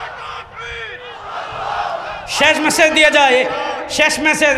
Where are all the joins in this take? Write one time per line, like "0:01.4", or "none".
none

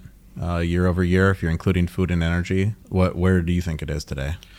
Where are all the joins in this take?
0:02.8

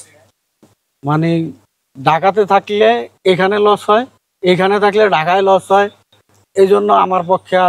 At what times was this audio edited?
none

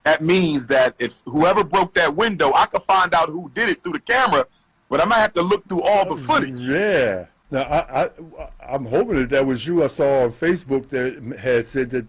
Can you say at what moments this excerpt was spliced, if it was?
0:07.3

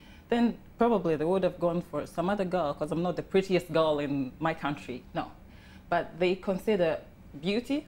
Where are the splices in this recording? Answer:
none

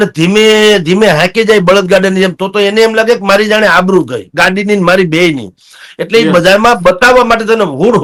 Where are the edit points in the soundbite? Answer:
none

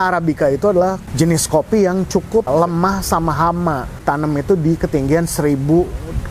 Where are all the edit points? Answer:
0:01.0
0:02.5
0:04.0

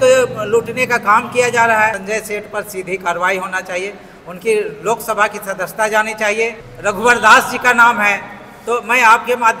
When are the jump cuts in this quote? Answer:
0:02.0
0:06.6

